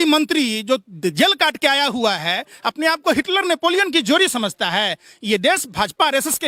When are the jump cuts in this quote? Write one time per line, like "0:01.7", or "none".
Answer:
none